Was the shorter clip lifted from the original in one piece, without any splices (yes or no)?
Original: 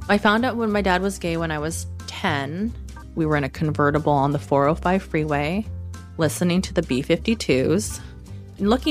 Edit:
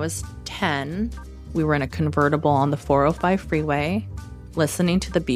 yes